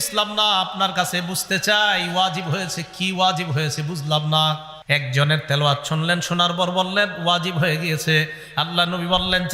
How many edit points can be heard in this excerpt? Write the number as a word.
one